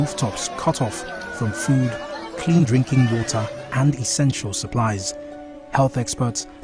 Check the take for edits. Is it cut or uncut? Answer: cut